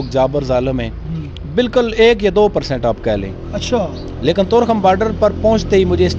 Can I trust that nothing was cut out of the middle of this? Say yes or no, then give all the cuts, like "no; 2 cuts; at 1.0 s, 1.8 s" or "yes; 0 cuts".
yes; 0 cuts